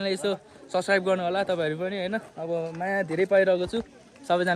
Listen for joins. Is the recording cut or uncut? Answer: uncut